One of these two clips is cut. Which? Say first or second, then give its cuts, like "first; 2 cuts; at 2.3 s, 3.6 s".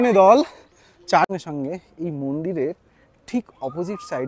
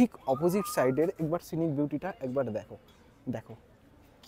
first; 1 cut; at 1.3 s